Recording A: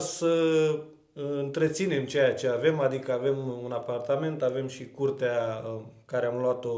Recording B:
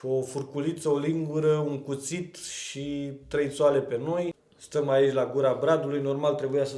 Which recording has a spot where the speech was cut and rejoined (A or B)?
B